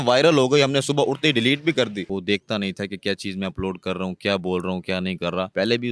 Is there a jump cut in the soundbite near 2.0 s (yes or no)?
yes